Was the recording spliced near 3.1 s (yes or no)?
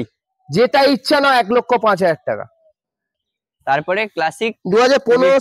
yes